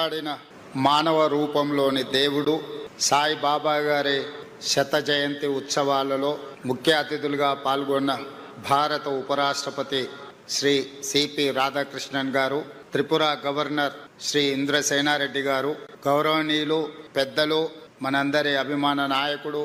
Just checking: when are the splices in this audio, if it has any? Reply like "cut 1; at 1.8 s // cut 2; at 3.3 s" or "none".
none